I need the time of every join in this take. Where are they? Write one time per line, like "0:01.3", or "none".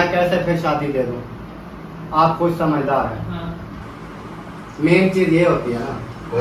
none